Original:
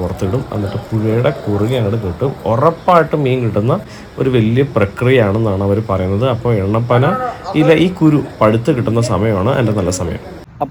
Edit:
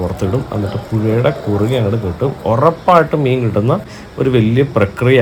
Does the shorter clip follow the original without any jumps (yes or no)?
yes